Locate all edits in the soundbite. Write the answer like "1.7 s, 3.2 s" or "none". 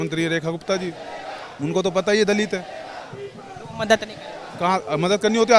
none

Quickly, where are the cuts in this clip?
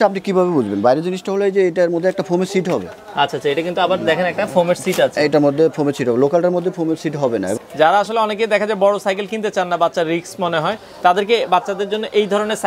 7.5 s

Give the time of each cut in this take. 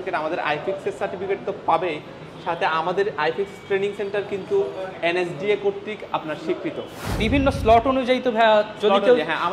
7.2 s

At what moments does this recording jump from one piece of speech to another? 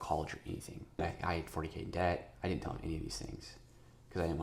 1.1 s

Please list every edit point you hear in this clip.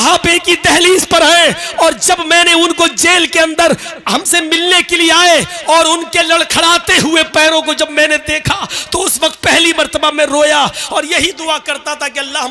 none

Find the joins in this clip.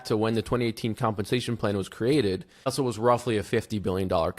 2.7 s

